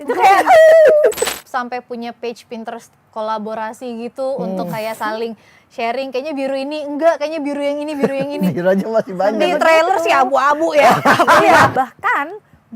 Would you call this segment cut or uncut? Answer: cut